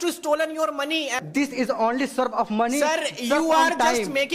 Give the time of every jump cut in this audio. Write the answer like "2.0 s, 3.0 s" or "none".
1.2 s